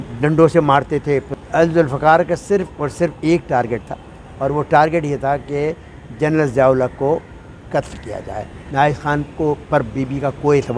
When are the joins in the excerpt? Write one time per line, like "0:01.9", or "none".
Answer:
0:01.3
0:08.6